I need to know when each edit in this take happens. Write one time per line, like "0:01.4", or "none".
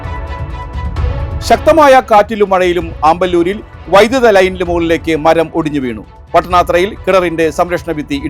0:01.4